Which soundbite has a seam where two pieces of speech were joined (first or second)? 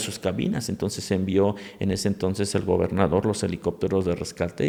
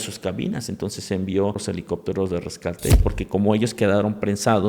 second